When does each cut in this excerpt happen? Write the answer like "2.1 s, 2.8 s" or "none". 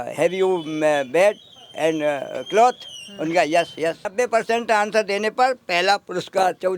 4.1 s